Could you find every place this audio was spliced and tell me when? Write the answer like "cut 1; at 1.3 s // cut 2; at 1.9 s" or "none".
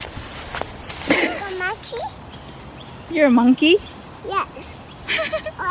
cut 1; at 1.6 s